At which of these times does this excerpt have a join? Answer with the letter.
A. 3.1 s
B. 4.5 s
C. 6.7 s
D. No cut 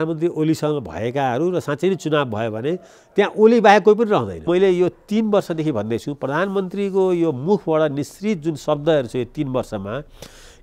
B